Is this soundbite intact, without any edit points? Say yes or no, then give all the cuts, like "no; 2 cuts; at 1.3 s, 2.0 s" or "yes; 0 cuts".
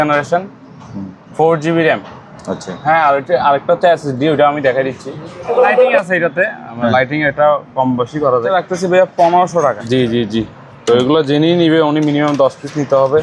no; 3 cuts; at 5.5 s, 8.5 s, 9.8 s